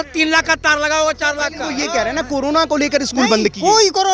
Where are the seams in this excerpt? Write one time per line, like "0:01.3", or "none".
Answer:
0:01.7